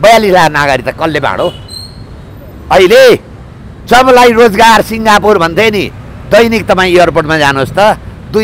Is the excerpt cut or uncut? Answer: uncut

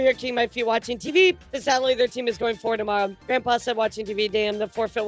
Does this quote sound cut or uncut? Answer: uncut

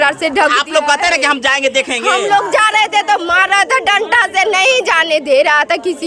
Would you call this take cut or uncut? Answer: uncut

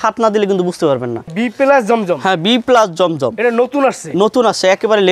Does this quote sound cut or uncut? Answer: cut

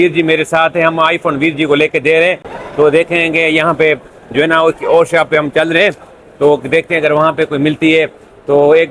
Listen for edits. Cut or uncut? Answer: uncut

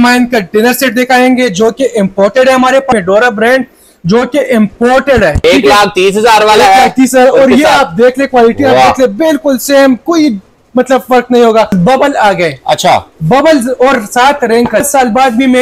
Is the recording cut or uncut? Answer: cut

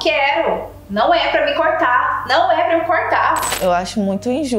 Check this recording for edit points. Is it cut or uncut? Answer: cut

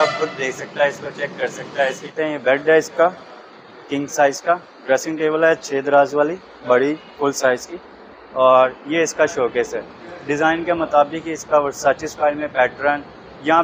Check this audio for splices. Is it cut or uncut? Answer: cut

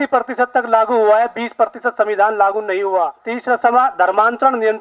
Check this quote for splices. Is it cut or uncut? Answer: cut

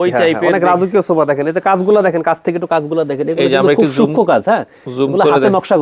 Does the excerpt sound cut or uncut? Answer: uncut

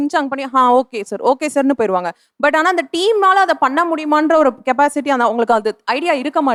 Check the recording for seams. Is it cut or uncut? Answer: uncut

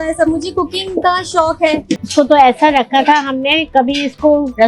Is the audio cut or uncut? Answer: cut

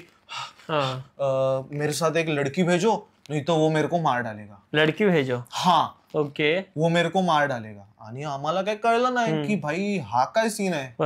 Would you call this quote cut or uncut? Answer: uncut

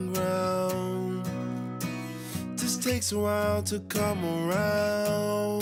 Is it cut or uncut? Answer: uncut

